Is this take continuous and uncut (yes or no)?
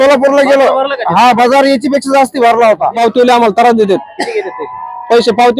no